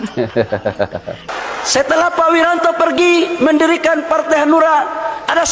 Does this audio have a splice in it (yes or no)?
yes